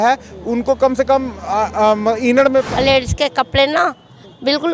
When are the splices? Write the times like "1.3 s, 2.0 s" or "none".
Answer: 2.7 s